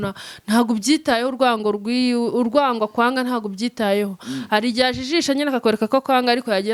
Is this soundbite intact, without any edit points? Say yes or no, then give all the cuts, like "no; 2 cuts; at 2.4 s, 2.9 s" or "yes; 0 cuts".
yes; 0 cuts